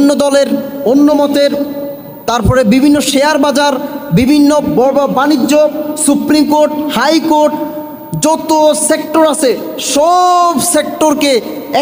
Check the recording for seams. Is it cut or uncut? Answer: cut